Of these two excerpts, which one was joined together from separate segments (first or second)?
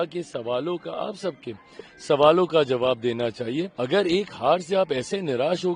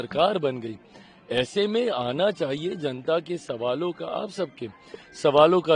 first